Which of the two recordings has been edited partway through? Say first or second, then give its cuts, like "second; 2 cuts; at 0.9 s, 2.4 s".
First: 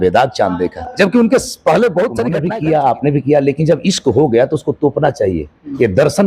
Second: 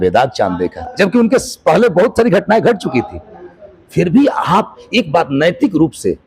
first; 1 cut; at 2.4 s